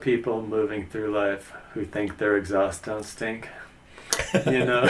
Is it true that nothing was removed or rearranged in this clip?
yes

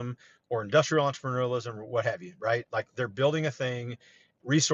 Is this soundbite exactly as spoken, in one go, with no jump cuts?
yes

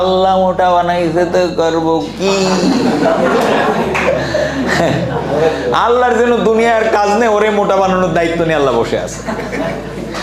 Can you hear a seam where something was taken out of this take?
no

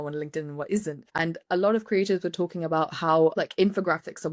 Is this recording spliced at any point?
yes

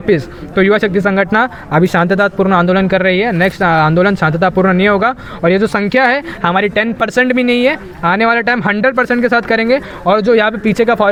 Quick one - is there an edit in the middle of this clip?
no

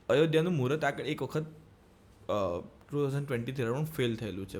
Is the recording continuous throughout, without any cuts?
yes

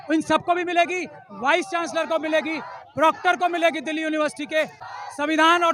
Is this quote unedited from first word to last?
no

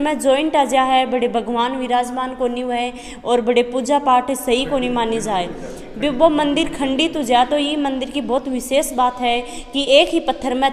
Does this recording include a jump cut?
no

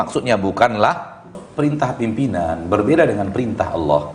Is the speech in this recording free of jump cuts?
no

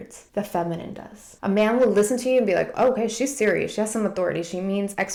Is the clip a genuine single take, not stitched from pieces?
yes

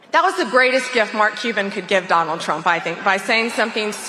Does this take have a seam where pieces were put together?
no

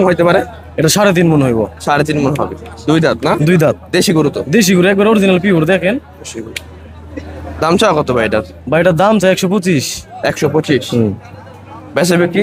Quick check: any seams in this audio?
no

